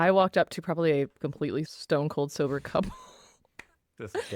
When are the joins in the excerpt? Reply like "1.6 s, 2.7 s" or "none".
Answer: 1.7 s